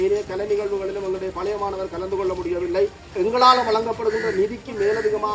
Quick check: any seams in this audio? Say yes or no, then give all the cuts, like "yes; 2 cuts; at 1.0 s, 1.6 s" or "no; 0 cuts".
yes; 1 cut; at 3.1 s